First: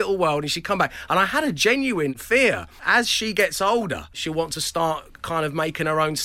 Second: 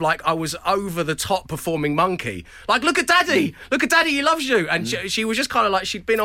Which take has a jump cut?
first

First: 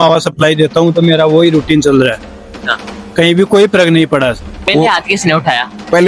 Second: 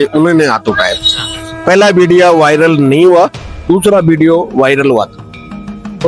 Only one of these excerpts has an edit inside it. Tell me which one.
first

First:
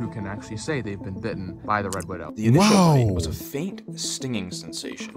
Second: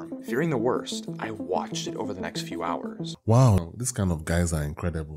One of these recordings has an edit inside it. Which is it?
second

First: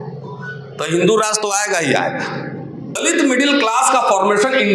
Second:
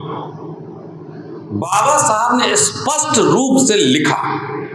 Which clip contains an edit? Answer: first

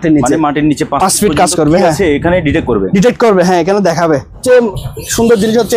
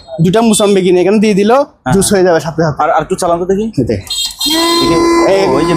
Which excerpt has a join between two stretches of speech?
first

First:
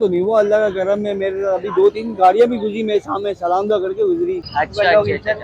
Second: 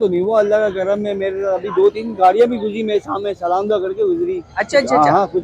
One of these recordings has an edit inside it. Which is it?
first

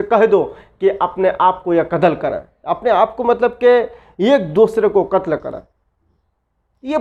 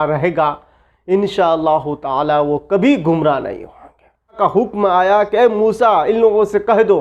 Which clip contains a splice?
second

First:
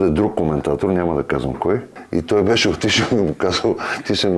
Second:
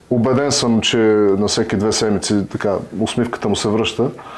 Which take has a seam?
first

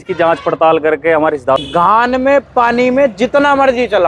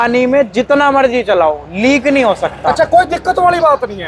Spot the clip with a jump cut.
first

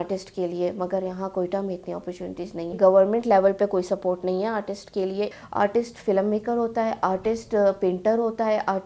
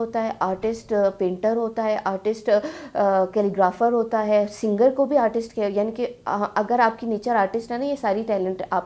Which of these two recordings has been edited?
first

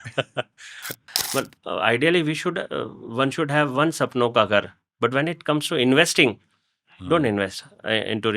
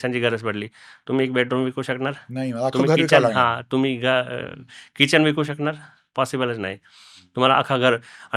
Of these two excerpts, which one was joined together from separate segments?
first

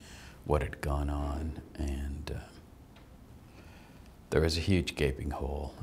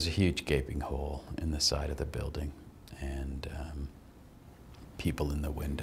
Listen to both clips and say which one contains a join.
second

